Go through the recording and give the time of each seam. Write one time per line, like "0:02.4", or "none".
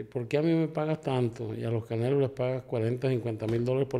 none